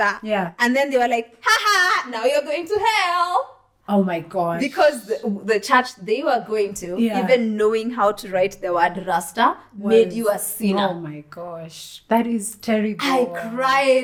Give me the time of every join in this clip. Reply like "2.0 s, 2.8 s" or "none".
none